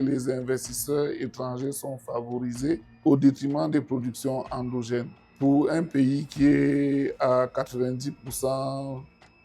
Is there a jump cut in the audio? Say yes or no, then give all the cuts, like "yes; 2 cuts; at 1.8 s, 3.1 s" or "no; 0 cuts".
yes; 2 cuts; at 2.9 s, 5.2 s